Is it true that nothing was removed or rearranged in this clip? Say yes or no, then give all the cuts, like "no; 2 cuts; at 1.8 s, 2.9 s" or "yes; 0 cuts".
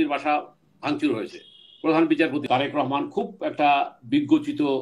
no; 1 cut; at 2.4 s